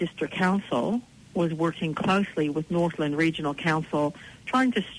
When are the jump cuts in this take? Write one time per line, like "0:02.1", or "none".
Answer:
0:01.2

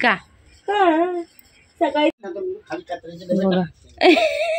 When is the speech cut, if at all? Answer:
0:02.1

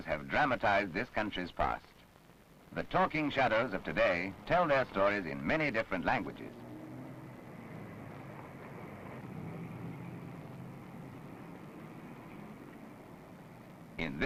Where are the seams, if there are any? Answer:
0:06.4

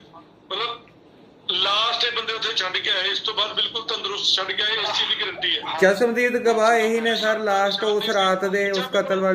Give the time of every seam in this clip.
none

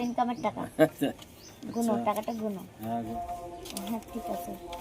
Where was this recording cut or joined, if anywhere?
0:03.1

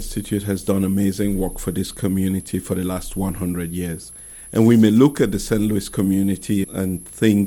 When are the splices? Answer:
none

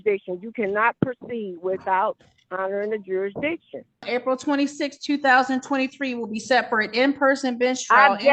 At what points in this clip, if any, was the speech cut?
0:04.1

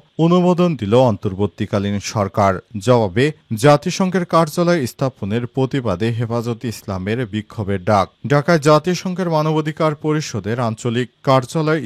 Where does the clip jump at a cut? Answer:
none

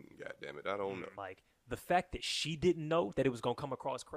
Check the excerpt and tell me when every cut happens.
0:01.2

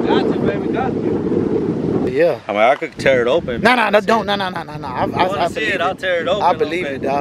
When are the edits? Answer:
0:02.1

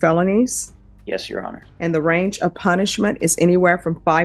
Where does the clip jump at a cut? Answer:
0:01.6

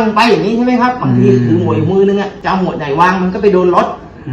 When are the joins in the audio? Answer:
0:02.3

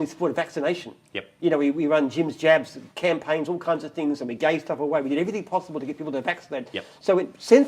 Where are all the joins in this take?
none

